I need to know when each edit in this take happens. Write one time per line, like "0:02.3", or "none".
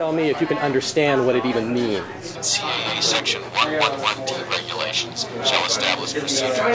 0:02.4